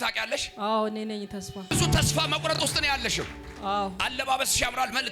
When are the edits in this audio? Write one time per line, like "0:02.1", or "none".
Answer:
0:01.7